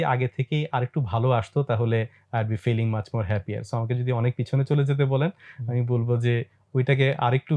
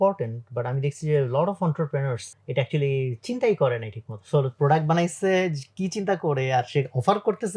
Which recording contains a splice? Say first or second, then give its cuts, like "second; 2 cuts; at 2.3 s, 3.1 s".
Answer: second; 1 cut; at 2.3 s